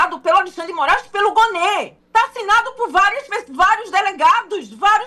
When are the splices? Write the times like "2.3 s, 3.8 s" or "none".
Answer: 2.0 s